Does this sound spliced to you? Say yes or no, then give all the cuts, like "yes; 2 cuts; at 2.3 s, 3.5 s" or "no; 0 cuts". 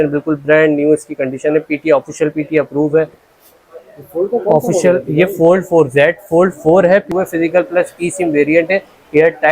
yes; 2 cuts; at 3.3 s, 7.1 s